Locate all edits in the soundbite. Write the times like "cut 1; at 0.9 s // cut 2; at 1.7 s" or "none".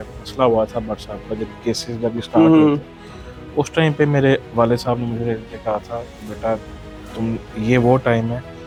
none